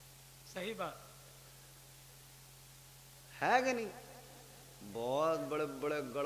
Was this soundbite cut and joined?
no; 0 cuts

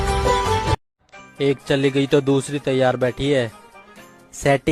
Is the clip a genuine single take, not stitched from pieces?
no; 1 cut; at 0.9 s

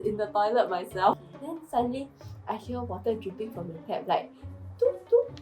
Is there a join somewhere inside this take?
yes; 1 cut; at 1.3 s

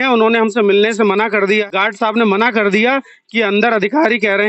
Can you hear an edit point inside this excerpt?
yes; 1 cut; at 1.6 s

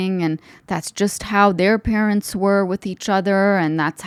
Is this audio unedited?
yes; 0 cuts

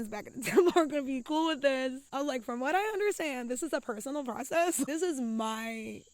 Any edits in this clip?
yes; 2 cuts; at 2.0 s, 4.9 s

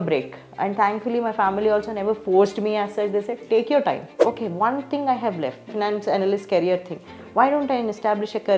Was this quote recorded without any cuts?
no; 2 cuts; at 4.1 s, 5.7 s

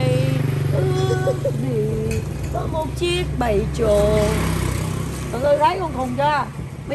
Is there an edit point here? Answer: no; 0 cuts

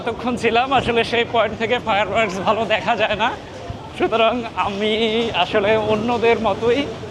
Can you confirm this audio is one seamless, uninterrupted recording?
yes; 0 cuts

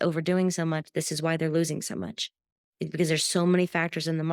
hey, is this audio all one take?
yes; 0 cuts

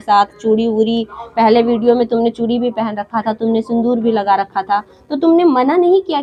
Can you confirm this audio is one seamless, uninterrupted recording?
yes; 0 cuts

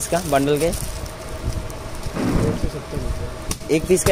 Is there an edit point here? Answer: no; 0 cuts

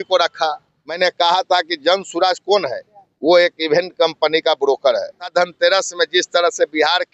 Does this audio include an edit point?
yes; 2 cuts; at 1.0 s, 5.3 s

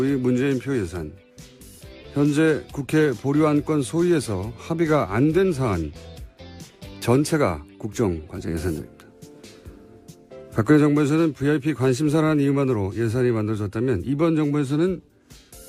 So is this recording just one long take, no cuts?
yes; 0 cuts

